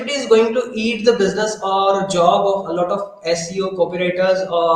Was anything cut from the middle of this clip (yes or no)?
no